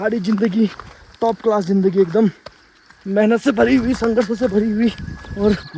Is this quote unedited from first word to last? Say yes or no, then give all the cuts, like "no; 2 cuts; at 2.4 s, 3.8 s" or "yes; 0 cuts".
yes; 0 cuts